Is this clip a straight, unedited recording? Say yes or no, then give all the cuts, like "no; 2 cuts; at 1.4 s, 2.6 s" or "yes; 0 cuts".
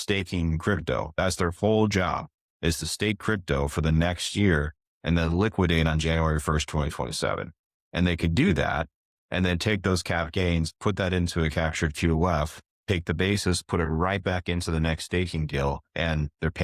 yes; 0 cuts